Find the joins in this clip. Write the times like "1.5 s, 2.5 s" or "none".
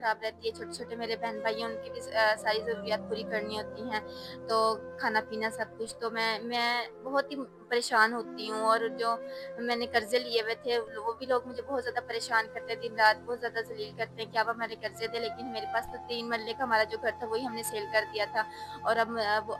none